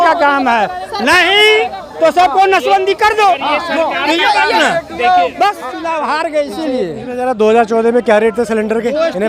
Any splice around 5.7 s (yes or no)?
yes